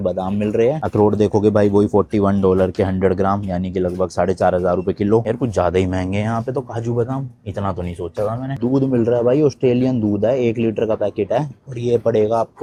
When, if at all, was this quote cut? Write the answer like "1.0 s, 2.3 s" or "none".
none